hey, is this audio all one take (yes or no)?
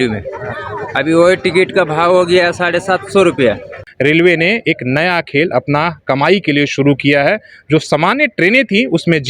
no